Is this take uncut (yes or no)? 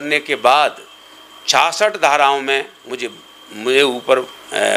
yes